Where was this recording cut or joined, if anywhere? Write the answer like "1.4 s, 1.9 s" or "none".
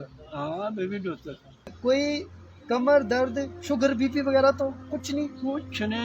1.8 s